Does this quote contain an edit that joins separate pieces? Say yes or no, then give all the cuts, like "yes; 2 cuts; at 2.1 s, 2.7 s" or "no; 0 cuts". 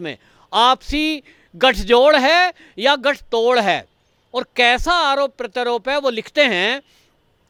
no; 0 cuts